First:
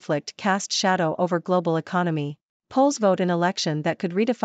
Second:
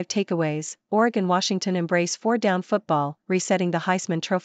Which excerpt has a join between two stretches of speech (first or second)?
first